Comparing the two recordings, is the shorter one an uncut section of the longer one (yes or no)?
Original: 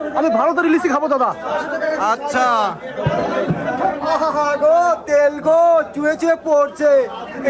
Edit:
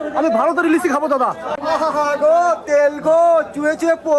no